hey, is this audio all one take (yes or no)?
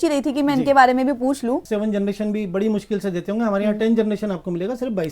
no